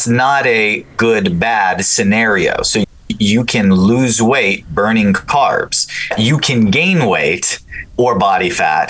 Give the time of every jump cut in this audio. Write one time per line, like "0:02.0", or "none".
0:06.0